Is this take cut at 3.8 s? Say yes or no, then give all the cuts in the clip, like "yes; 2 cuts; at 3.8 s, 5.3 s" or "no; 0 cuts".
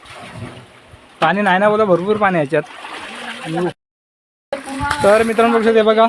yes; 1 cut; at 3.8 s